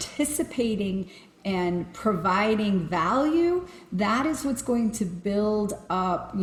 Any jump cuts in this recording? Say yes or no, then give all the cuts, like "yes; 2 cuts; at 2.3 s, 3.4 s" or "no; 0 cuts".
no; 0 cuts